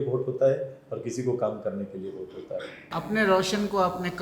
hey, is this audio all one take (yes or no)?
no